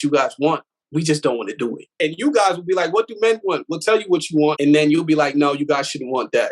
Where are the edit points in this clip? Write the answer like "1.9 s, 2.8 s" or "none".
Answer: 1.9 s, 4.6 s